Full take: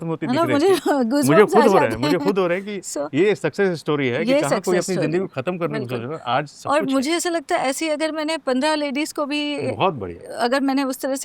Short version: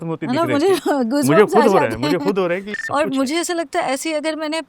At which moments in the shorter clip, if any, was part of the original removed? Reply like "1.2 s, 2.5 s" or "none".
2.8 s